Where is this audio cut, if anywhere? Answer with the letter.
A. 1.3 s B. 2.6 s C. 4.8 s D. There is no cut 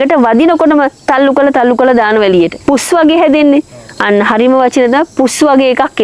B